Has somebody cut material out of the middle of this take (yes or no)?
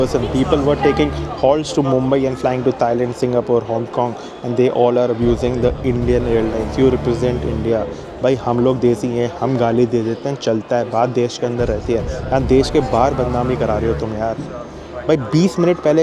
no